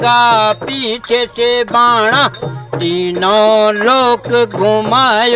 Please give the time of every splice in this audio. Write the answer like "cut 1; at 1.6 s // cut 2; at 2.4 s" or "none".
none